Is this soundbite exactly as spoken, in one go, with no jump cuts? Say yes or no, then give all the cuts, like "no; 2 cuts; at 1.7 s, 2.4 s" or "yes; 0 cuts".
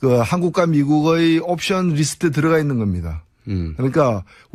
yes; 0 cuts